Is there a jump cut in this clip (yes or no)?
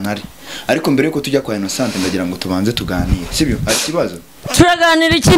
no